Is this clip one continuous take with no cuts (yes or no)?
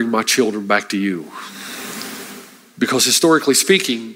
no